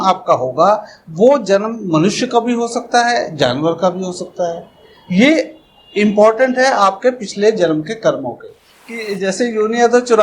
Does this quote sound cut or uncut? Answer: cut